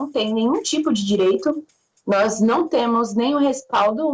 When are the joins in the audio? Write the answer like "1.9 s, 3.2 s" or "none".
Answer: none